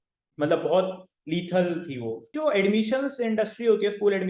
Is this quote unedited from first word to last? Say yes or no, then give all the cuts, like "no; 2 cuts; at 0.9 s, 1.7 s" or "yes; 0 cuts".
no; 1 cut; at 2.3 s